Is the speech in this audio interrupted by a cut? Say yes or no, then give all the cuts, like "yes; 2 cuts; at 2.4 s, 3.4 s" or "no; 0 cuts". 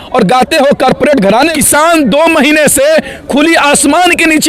yes; 1 cut; at 1.3 s